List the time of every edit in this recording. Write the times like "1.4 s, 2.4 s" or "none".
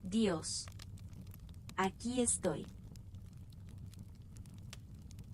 none